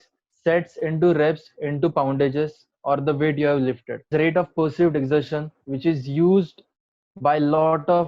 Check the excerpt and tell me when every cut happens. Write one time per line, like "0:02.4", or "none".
0:04.1